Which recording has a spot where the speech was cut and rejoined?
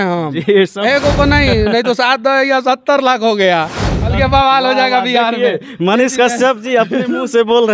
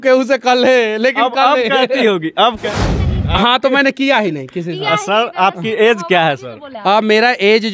second; 1 cut; at 2.8 s

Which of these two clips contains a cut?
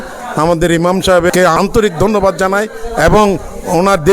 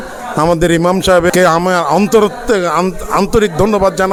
first; 1 cut; at 1.6 s

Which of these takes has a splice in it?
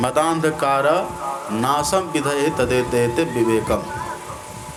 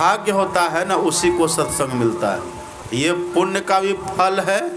second; 1 cut; at 2.7 s

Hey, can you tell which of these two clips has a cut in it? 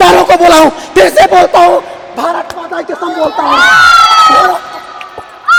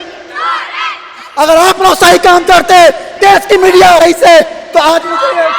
second; 1 cut; at 4.0 s

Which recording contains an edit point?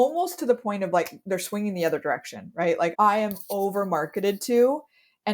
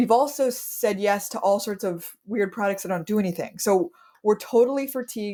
first; 1 cut; at 2.9 s

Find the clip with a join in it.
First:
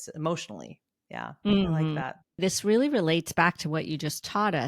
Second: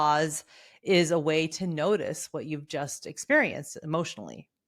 first; 1 cut; at 2.4 s

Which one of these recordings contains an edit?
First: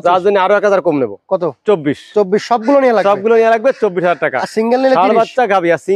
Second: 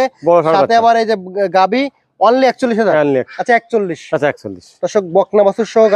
second; 1 cut; at 3.3 s

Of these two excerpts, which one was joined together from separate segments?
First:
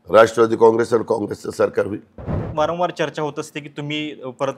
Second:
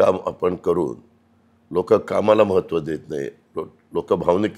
first; 1 cut; at 2.4 s

